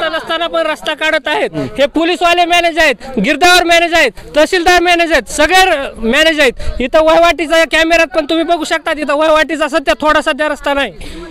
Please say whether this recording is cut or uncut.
uncut